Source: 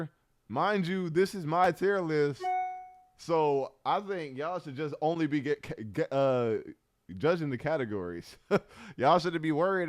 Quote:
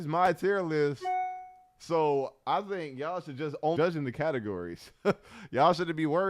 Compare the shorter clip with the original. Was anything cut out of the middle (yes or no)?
yes